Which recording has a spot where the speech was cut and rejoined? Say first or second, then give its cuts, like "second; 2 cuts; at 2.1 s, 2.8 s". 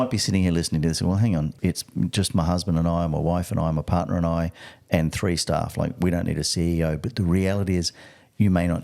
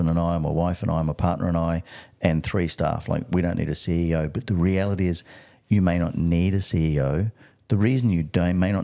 first; 1 cut; at 1.5 s